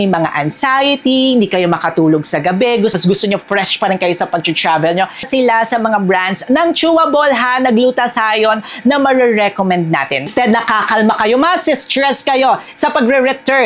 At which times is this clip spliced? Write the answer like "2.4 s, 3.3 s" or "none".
3.0 s, 5.3 s, 10.3 s